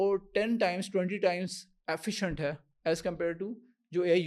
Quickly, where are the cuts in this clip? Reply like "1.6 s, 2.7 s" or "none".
none